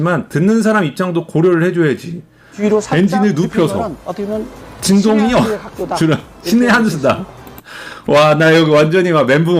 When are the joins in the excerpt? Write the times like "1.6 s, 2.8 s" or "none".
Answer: 2.5 s